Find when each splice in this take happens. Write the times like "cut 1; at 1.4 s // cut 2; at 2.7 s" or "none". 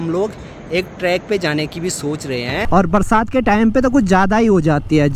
cut 1; at 2.6 s